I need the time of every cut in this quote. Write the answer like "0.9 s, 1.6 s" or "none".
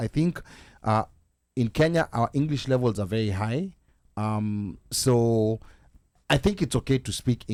none